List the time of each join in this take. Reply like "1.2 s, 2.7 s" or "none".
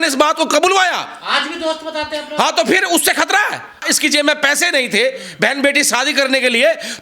3.8 s